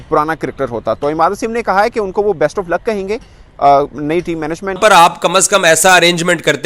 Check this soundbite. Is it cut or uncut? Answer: cut